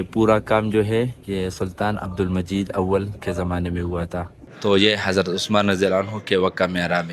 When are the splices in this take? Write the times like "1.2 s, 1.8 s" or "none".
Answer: 4.4 s